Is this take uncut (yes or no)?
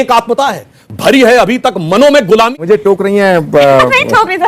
no